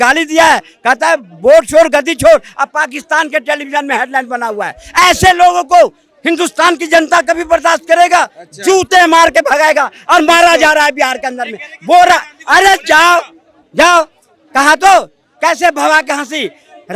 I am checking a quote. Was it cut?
no; 0 cuts

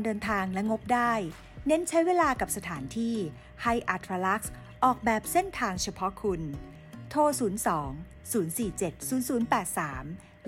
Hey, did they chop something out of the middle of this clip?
no; 0 cuts

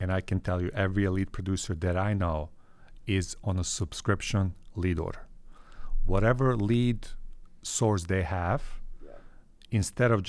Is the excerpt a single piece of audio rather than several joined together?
yes; 0 cuts

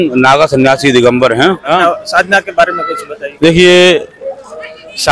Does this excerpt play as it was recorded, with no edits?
no; 1 cut; at 1.7 s

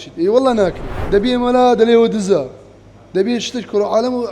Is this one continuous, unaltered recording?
no; 1 cut; at 0.9 s

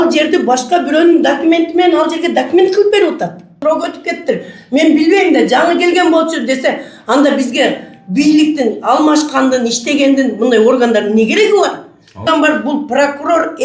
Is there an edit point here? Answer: yes; 2 cuts; at 3.6 s, 12.2 s

